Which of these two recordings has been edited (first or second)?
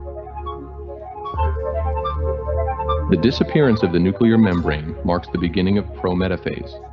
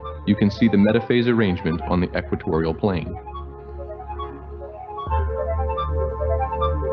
second